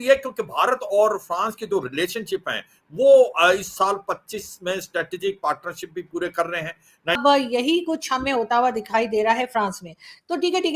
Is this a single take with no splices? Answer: no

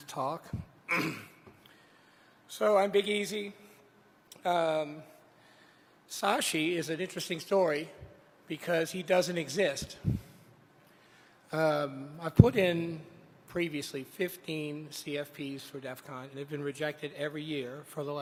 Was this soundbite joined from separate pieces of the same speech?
no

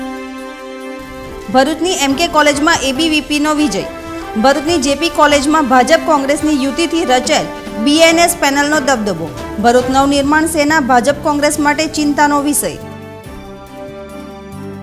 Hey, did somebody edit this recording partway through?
yes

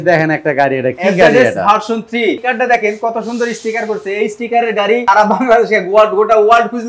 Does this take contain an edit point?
yes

